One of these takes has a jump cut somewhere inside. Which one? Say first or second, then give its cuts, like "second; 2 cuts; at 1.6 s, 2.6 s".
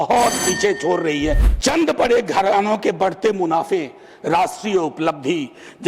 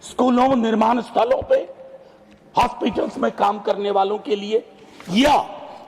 first; 1 cut; at 1.5 s